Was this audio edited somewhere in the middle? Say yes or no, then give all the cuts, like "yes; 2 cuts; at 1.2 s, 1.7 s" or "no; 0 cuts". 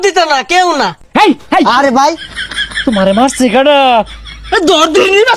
yes; 1 cut; at 1.0 s